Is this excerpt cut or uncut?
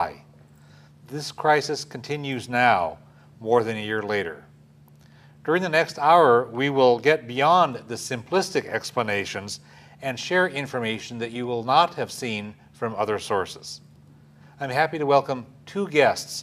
cut